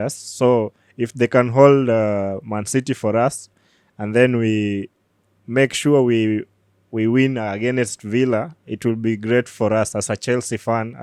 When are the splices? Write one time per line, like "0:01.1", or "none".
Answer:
none

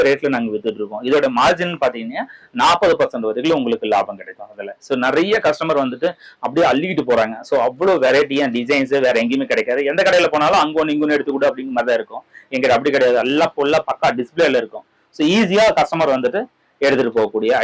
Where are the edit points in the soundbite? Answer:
none

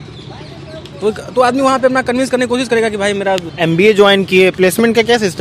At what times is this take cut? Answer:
0:03.5

